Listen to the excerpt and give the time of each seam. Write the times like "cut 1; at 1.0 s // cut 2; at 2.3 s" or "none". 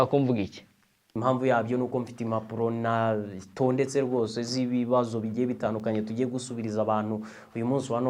cut 1; at 1.0 s